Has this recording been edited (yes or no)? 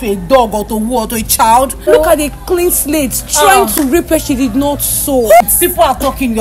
yes